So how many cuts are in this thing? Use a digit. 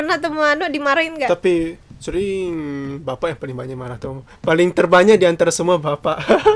0